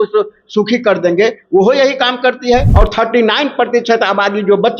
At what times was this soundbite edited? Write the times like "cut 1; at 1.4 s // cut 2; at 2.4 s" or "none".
cut 1; at 2.7 s